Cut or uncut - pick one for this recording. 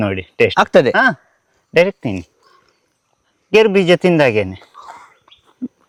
uncut